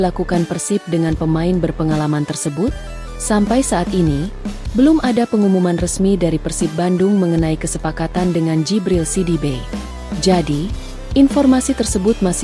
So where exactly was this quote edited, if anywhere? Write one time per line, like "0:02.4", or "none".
none